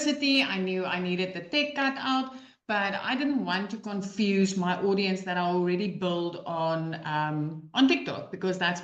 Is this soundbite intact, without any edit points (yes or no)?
yes